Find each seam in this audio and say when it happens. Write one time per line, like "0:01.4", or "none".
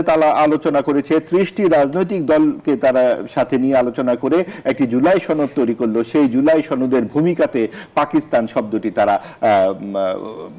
none

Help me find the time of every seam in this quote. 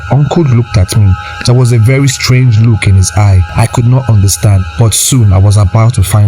0:03.4
0:04.7

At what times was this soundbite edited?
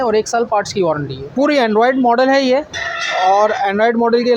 0:01.3

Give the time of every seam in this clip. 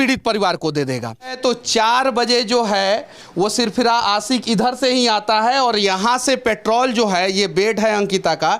0:01.4

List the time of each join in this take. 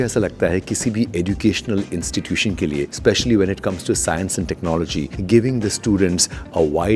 0:02.9
0:05.1

